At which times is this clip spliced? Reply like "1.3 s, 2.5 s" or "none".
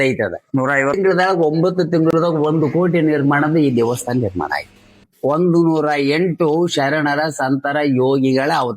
1.0 s, 5.0 s